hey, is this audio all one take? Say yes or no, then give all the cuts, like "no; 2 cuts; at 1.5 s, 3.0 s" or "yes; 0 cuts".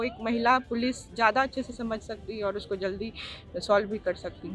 yes; 0 cuts